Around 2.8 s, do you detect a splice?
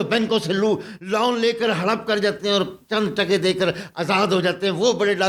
no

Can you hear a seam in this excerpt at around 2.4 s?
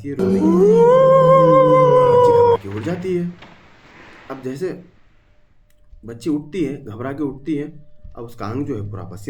no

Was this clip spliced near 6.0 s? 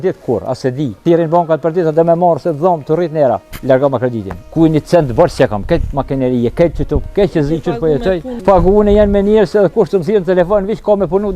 no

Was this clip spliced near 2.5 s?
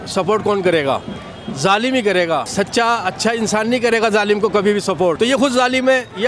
yes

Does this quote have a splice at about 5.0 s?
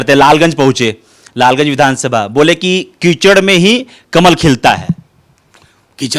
no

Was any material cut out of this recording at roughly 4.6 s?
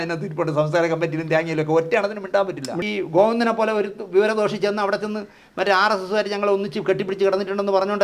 no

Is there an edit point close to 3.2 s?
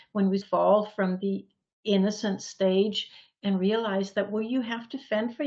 no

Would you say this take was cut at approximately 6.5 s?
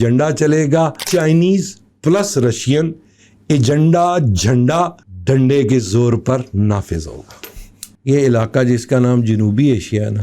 no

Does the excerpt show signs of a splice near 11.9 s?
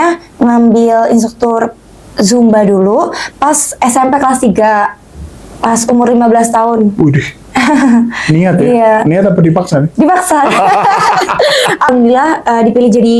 yes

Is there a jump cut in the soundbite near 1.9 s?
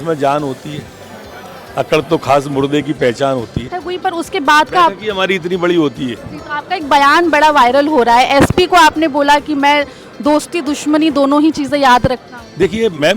no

